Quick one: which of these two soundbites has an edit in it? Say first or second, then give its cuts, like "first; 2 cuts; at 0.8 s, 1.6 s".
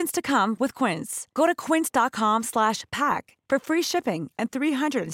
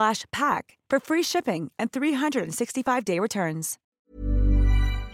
second; 1 cut; at 3.9 s